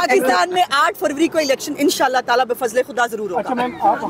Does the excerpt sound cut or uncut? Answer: uncut